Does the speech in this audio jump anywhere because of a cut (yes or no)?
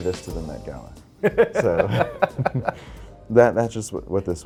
no